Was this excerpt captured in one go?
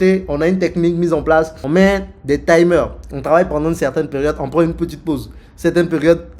no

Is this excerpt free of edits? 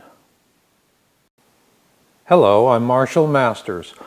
no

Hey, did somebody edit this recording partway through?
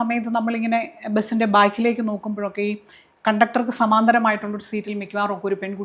no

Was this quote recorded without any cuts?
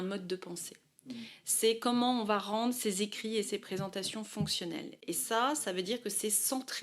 no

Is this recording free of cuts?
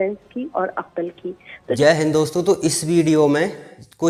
yes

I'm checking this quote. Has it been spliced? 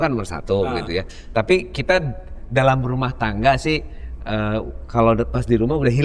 no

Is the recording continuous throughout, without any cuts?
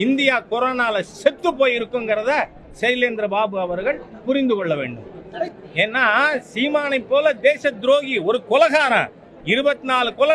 yes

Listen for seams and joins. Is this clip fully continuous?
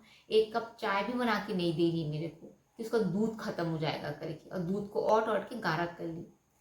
yes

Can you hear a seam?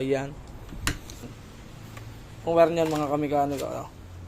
yes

